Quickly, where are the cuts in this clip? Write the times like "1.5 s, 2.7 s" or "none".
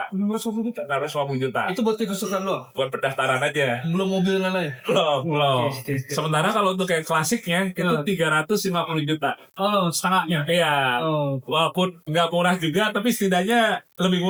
none